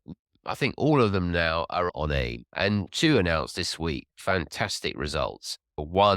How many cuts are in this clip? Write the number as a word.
one